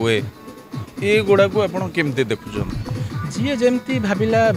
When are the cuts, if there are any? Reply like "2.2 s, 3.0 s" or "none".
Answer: none

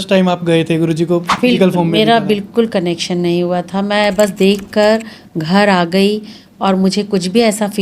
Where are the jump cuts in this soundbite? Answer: none

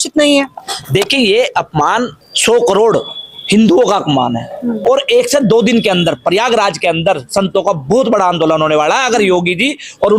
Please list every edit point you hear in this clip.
2.2 s, 4.8 s

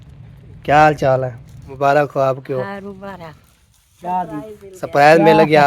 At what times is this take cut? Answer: 2.1 s

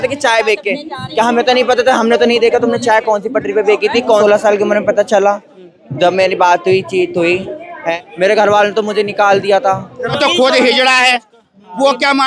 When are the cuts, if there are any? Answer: 4.2 s, 7.9 s, 10.2 s

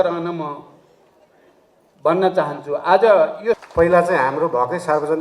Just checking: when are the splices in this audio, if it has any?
3.6 s

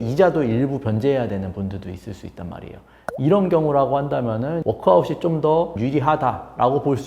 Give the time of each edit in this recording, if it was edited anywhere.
4.6 s, 5.8 s

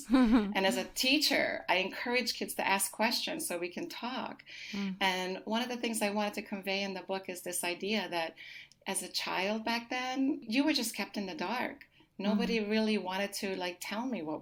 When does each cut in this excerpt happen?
none

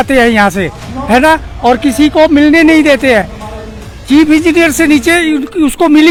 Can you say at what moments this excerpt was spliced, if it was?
none

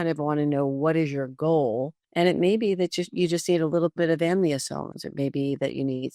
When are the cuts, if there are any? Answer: 2.0 s

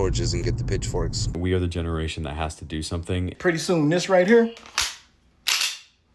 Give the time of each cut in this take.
1.3 s, 3.3 s

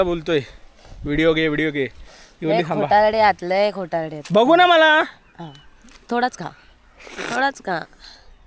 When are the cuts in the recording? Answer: none

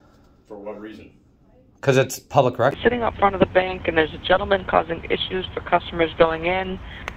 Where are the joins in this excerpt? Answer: 2.8 s

